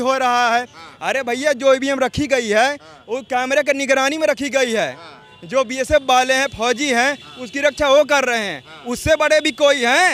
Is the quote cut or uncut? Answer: uncut